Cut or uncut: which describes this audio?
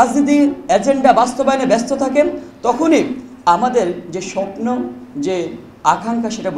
uncut